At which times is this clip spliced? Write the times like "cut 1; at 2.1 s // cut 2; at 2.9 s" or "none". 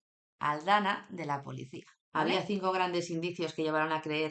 cut 1; at 2.3 s

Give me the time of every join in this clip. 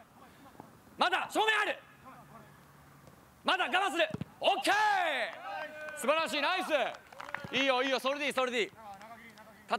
none

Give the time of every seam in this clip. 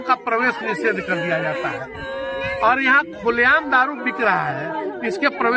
none

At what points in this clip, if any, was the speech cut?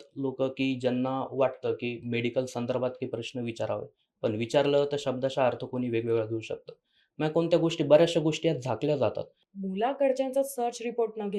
cut 1; at 9.4 s

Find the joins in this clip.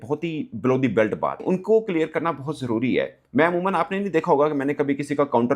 cut 1; at 1.4 s

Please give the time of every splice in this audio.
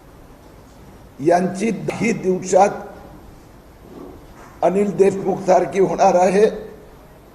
cut 1; at 1.9 s

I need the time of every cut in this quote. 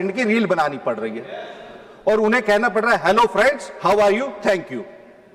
none

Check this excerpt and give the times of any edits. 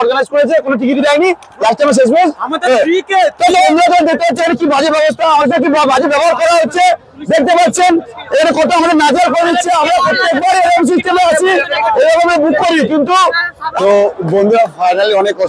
cut 1; at 3.7 s // cut 2; at 13.8 s

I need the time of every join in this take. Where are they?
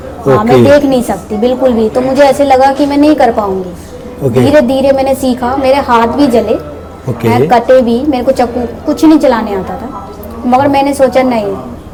none

